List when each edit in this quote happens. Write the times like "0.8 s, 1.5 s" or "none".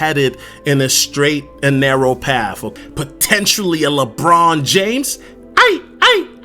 2.7 s